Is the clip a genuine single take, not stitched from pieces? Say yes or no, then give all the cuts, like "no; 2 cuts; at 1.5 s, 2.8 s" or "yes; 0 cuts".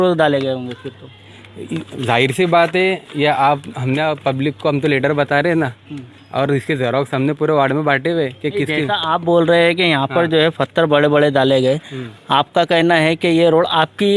yes; 0 cuts